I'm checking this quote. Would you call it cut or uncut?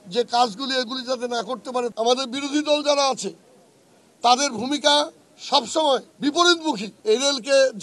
cut